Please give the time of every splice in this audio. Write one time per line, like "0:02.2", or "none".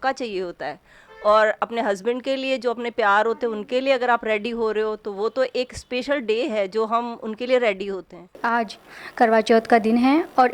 0:08.4